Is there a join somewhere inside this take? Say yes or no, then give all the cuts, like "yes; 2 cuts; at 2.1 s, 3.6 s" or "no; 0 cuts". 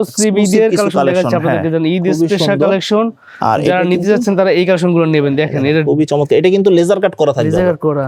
no; 0 cuts